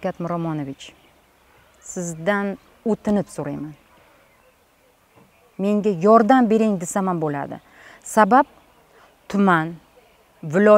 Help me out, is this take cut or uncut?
uncut